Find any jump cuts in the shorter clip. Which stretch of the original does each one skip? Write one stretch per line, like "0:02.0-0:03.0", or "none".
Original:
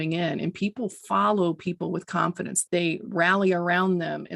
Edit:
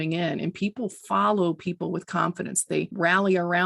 0:02.7-0:02.9